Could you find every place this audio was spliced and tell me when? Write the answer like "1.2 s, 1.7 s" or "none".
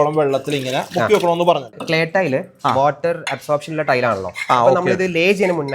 1.7 s